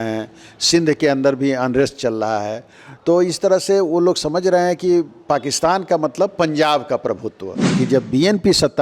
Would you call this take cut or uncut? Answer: cut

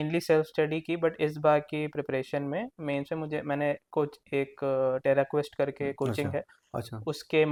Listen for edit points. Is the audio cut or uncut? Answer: uncut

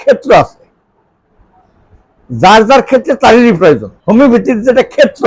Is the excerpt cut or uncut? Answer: cut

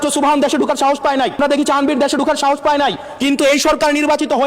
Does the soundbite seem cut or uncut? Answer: cut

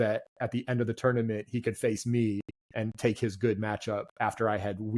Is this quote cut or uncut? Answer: uncut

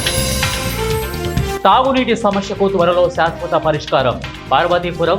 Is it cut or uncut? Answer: cut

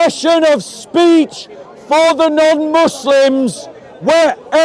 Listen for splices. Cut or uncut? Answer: uncut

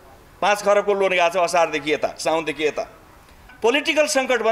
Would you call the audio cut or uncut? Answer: cut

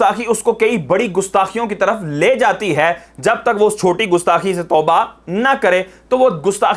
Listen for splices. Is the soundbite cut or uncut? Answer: uncut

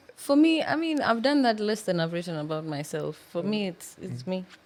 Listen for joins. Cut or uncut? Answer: uncut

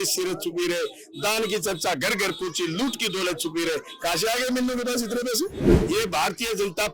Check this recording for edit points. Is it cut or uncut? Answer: cut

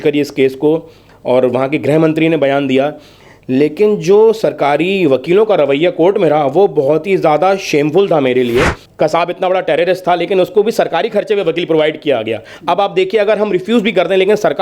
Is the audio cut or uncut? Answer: cut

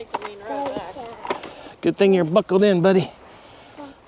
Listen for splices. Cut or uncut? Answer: uncut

